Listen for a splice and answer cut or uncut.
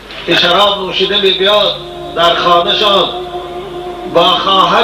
uncut